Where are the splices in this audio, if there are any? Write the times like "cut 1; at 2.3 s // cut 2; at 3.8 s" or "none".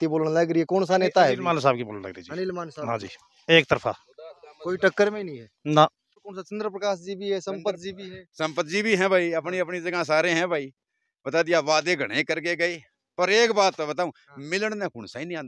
cut 1; at 6.1 s